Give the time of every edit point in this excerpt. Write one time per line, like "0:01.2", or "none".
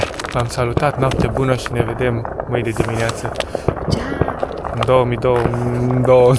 none